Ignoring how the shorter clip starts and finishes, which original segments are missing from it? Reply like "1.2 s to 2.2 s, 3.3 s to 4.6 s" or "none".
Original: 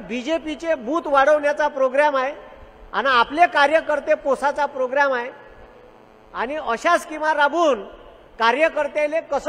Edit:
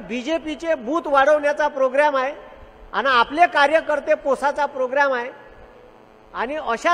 none